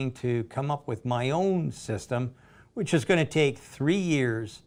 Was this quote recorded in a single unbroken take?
yes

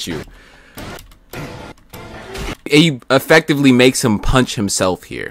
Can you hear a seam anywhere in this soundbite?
yes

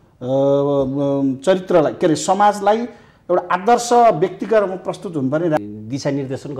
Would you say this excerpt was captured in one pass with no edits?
no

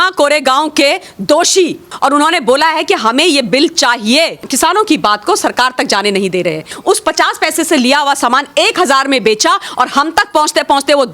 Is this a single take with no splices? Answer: no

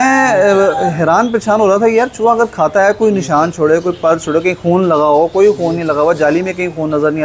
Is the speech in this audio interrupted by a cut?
no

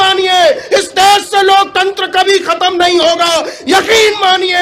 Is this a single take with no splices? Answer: yes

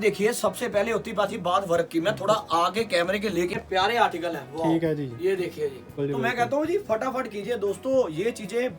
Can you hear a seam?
yes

